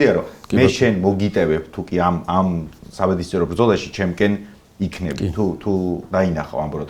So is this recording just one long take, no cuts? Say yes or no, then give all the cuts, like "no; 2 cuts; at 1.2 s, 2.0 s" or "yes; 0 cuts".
yes; 0 cuts